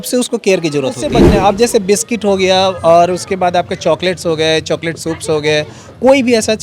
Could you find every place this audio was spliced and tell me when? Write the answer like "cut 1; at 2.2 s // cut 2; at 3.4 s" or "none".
cut 1; at 1.2 s